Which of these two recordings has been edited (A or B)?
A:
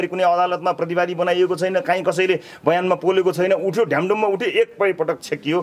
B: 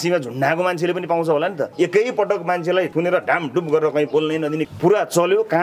B